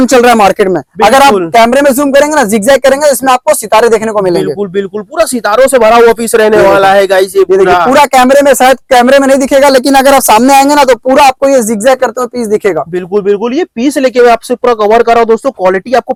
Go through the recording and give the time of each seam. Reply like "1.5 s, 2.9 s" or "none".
none